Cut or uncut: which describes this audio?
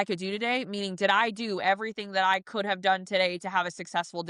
uncut